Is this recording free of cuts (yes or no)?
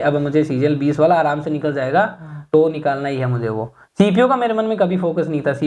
yes